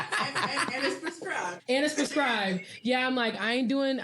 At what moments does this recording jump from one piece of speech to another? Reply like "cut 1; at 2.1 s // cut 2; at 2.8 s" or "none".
cut 1; at 1.6 s